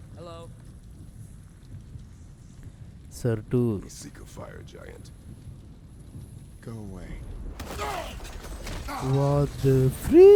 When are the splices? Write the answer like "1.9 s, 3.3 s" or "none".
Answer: none